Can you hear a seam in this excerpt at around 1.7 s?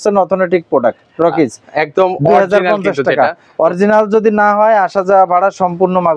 no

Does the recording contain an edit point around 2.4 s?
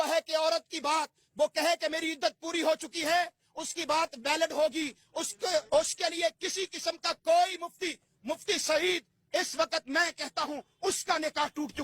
no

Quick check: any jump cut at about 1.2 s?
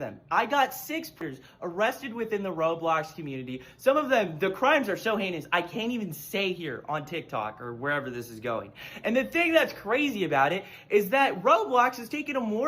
yes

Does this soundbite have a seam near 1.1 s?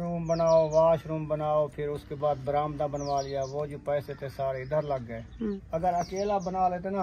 no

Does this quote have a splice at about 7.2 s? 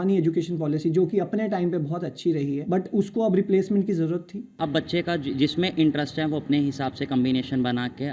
no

